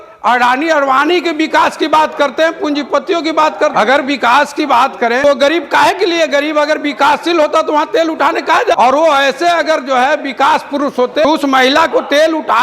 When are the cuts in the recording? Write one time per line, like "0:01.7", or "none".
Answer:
0:03.7
0:05.2
0:08.8
0:11.2